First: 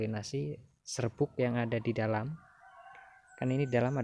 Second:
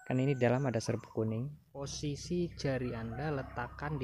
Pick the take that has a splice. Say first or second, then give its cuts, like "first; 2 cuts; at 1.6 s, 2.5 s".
second; 1 cut; at 1.9 s